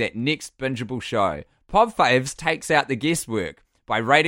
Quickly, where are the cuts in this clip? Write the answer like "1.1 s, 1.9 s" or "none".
1.5 s, 2.4 s